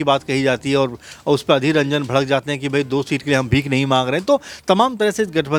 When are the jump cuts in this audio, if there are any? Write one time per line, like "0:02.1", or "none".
none